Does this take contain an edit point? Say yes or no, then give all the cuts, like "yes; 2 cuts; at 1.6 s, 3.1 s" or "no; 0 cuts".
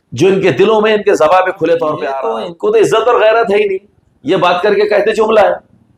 yes; 1 cut; at 2.1 s